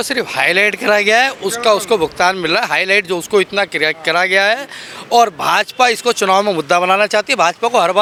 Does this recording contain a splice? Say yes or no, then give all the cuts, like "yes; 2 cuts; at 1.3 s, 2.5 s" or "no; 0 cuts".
no; 0 cuts